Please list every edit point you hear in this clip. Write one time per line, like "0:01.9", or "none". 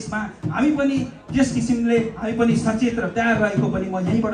none